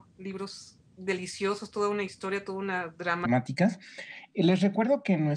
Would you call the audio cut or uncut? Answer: uncut